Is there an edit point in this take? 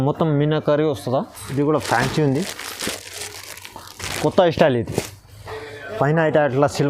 yes; 1 cut; at 1.4 s

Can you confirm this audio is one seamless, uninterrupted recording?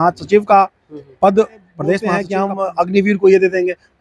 no; 1 cut; at 2.3 s

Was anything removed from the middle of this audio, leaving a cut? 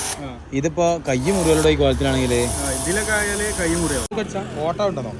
yes; 1 cut; at 4.1 s

